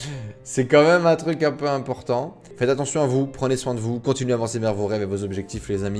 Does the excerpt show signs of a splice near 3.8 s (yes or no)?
no